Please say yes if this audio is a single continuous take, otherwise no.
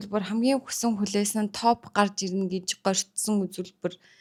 yes